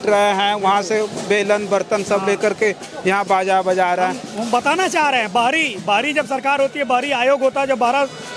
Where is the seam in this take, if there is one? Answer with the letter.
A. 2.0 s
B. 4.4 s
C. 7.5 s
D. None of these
D